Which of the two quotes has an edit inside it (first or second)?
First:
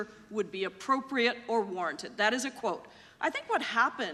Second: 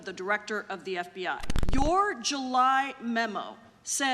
second